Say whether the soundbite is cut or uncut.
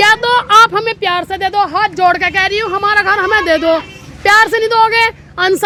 uncut